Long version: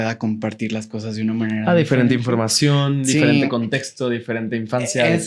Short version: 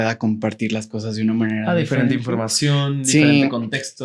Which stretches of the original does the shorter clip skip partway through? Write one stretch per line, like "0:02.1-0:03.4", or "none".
none